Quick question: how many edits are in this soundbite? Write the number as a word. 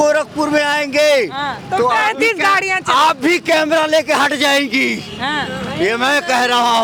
zero